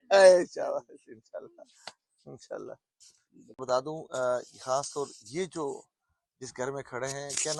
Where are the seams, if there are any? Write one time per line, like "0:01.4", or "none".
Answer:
none